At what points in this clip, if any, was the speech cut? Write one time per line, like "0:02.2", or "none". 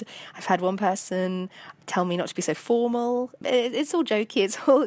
0:03.3